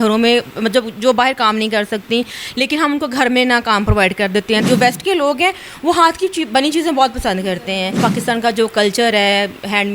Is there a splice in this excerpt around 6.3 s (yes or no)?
no